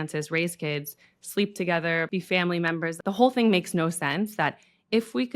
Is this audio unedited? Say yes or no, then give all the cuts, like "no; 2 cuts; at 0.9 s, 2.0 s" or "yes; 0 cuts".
no; 2 cuts; at 2.1 s, 3.0 s